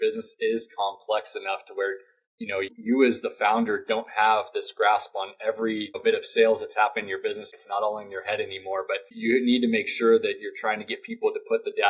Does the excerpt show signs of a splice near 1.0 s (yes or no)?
no